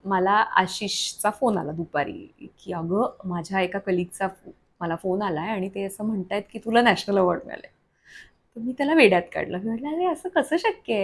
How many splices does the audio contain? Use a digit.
0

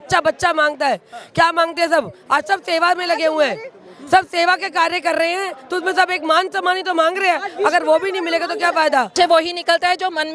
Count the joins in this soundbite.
1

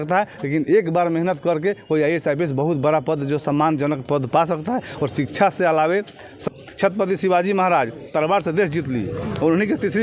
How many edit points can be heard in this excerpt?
1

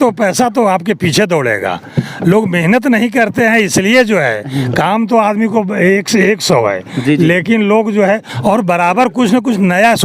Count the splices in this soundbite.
0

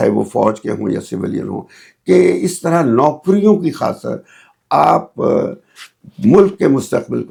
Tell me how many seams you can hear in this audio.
0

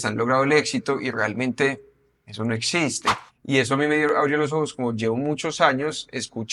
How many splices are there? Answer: 1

